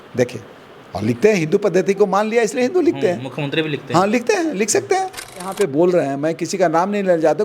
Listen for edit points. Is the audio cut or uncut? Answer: cut